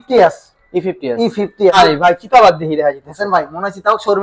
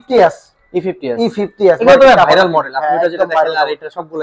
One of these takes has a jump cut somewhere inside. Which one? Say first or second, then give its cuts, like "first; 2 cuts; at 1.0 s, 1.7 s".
first; 1 cut; at 1.7 s